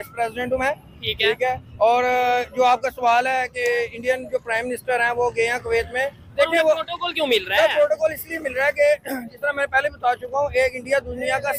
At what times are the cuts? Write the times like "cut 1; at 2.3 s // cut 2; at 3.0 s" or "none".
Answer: none